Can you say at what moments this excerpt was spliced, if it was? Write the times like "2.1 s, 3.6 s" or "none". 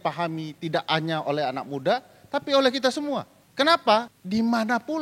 3.4 s, 4.2 s